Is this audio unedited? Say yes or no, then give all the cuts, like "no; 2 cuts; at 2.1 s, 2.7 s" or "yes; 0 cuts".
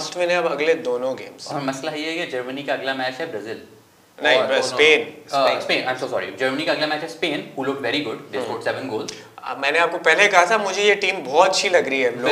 yes; 0 cuts